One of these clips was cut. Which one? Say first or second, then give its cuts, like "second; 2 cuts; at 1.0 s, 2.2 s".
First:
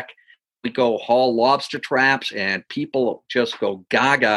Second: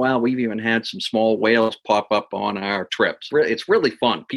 second; 1 cut; at 3.2 s